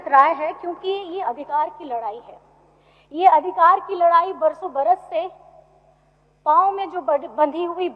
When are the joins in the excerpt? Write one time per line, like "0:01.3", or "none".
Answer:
none